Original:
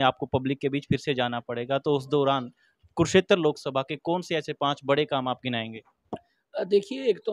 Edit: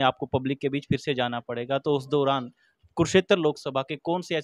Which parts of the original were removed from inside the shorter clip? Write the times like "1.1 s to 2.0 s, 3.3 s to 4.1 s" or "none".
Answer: none

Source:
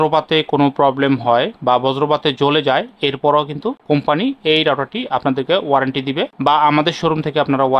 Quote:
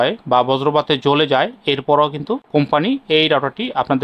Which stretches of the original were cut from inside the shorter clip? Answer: none

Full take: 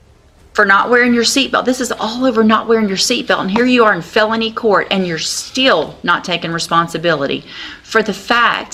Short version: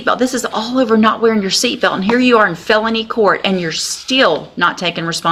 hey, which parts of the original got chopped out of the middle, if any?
none

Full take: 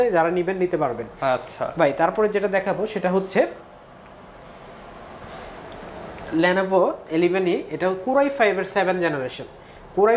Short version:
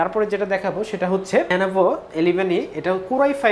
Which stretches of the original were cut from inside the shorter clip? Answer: 3.5 s to 6.5 s

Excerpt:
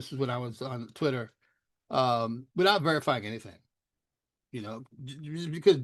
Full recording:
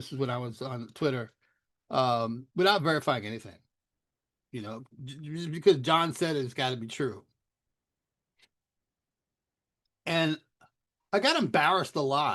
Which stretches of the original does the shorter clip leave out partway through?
none

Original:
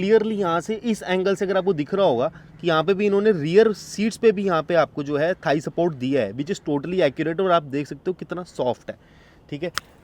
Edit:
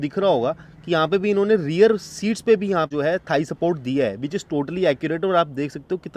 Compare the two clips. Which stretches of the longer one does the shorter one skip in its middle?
4.7 s to 5.1 s

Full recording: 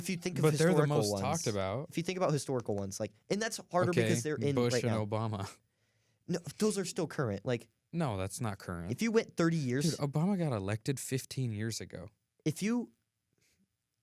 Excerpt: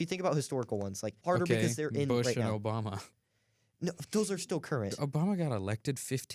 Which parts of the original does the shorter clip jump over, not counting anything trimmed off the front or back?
3.1 s to 3.6 s, 7.4 s to 10.0 s

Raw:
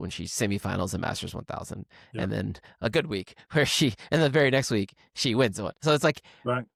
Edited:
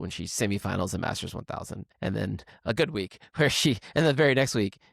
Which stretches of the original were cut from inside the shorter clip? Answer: 1.8 s to 2.0 s

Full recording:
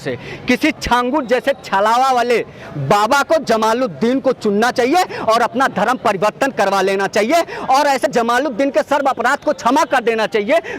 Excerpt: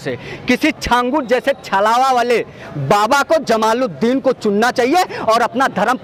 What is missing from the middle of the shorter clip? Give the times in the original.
none

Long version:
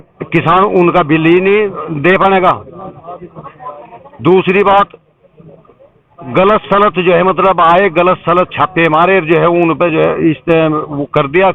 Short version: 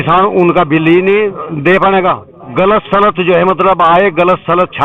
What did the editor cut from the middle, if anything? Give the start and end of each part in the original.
2.7 s to 6.1 s

